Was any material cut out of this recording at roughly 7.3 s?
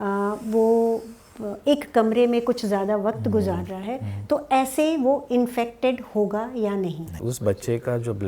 yes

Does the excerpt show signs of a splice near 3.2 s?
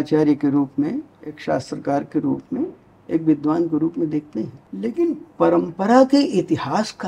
no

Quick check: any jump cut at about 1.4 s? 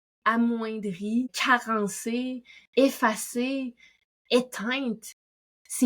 yes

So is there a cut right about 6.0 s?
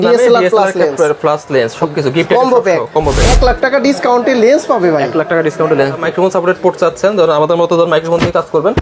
yes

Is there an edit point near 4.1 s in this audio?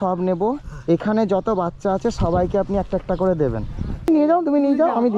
yes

